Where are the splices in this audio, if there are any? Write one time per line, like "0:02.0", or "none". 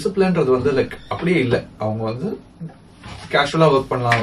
none